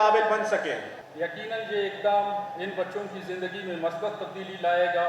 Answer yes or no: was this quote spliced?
yes